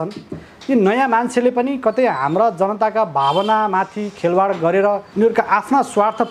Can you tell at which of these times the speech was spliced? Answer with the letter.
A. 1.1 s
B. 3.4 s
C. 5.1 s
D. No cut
C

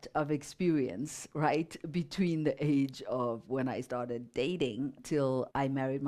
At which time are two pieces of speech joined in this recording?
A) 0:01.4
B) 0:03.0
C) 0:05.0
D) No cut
C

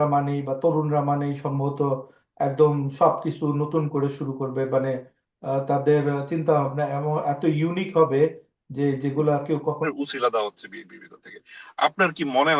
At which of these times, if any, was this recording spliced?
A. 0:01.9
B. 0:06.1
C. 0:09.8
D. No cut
C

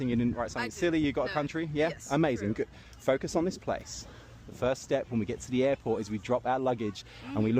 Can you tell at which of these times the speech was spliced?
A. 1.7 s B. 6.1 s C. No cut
A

